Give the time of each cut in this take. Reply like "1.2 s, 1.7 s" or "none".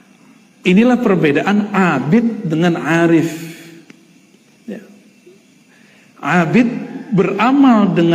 0.9 s